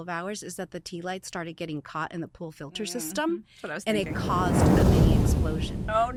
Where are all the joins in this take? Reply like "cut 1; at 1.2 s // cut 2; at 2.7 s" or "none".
none